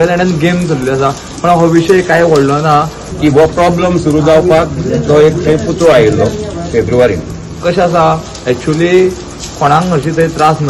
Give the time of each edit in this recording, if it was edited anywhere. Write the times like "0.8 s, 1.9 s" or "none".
3.0 s, 7.6 s